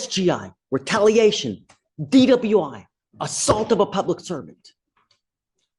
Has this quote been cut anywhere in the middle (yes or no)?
no